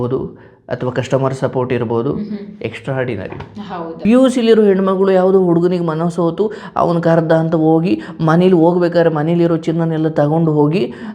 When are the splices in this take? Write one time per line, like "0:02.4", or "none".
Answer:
0:03.9